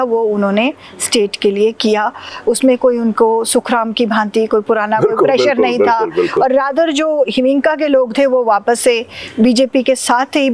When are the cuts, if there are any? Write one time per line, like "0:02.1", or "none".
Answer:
none